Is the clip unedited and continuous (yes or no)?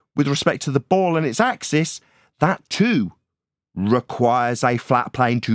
yes